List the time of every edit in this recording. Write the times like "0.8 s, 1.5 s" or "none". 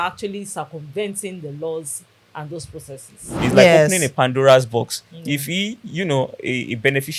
3.4 s